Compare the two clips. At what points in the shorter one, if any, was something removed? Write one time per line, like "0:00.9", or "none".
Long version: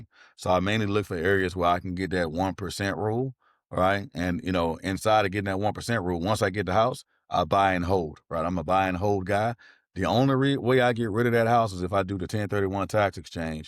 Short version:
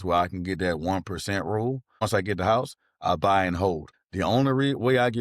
0:02.0
0:03.9